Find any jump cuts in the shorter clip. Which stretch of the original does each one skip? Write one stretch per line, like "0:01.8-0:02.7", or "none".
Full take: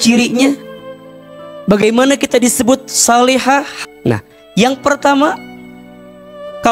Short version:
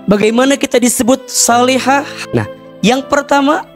0:03.8-0:03.9